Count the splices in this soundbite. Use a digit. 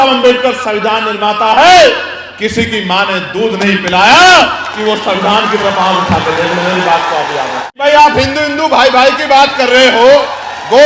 3